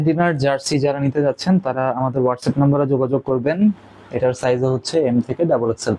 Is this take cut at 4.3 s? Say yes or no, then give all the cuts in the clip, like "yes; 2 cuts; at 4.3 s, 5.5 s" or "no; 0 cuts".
no; 0 cuts